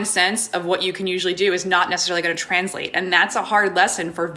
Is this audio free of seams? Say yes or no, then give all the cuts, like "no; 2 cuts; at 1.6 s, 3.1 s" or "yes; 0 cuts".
yes; 0 cuts